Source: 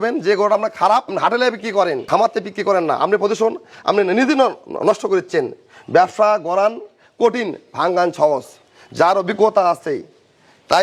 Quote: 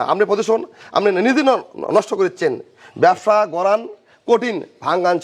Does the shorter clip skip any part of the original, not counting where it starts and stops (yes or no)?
no